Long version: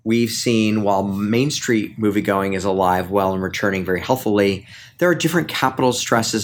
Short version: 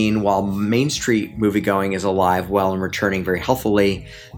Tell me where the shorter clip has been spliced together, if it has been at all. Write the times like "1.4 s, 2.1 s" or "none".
none

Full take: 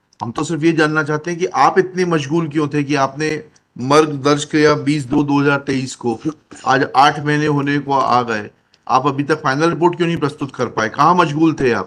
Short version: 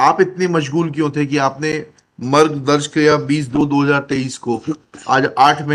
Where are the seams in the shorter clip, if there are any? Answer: none

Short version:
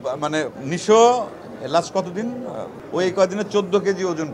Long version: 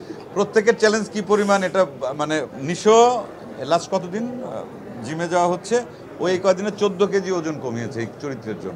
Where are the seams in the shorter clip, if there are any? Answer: 2.7 s

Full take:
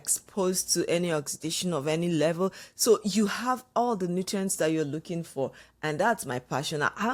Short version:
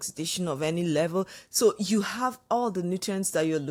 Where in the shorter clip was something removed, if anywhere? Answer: none

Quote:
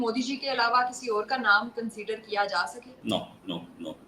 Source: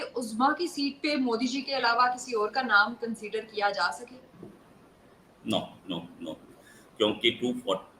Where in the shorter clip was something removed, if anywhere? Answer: 2.9 s

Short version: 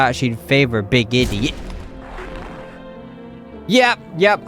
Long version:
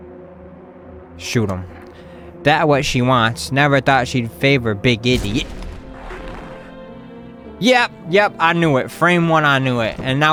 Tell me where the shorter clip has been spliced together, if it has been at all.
none

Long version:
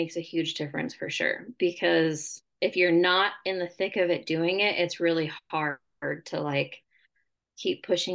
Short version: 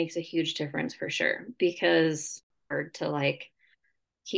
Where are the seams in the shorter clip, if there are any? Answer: 2.5 s

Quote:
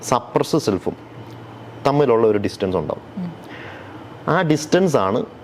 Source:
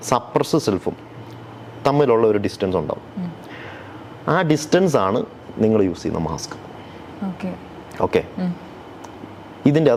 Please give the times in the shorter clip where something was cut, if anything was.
none

